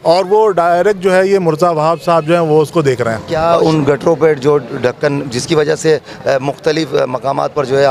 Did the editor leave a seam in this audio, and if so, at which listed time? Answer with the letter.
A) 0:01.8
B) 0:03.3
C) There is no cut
B